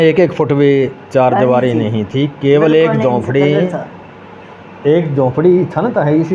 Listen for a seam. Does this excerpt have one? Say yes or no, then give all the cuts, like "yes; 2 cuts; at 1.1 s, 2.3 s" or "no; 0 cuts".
no; 0 cuts